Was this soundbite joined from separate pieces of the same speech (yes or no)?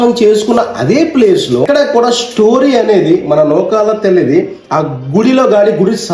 yes